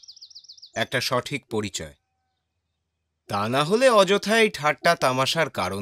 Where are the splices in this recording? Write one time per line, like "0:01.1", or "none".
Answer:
none